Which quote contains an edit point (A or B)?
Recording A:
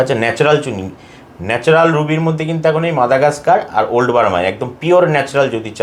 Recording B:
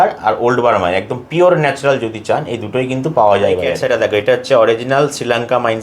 B